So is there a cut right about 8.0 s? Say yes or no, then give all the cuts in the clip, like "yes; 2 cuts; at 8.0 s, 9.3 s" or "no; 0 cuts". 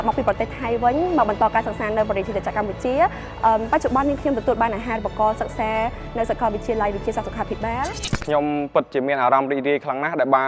yes; 1 cut; at 8.0 s